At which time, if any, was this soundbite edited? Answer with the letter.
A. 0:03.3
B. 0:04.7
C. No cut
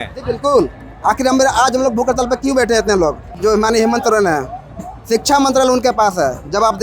A